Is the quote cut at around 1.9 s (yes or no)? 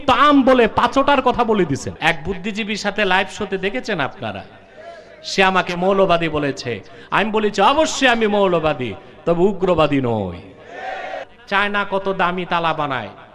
yes